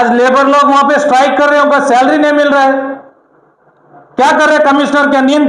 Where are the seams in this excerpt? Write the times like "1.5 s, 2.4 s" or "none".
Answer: none